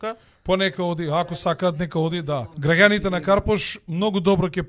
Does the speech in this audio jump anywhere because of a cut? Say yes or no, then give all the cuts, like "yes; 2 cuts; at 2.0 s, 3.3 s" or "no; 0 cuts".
yes; 1 cut; at 2.5 s